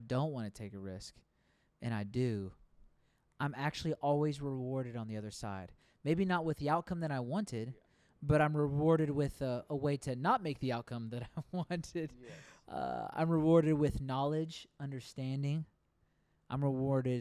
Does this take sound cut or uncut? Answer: uncut